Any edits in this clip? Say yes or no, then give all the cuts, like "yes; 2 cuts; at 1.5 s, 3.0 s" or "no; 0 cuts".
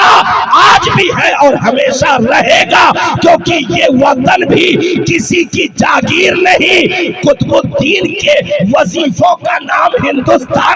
no; 0 cuts